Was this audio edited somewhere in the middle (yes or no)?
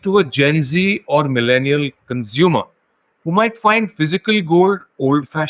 no